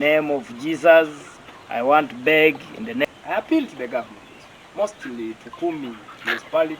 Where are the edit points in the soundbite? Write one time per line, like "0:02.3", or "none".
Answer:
0:03.0